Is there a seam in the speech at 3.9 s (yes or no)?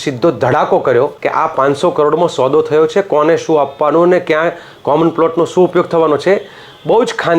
no